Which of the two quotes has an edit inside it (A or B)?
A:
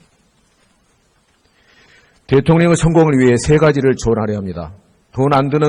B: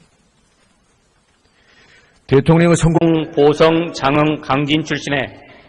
A